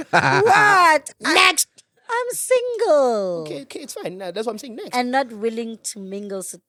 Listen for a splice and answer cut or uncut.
uncut